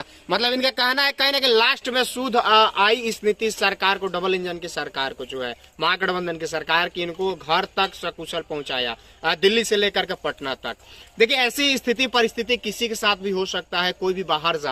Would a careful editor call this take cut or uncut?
uncut